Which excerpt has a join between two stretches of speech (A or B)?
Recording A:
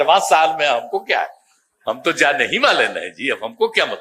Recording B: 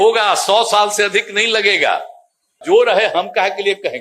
B